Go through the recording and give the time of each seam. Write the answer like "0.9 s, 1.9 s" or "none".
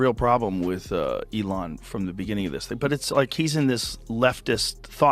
none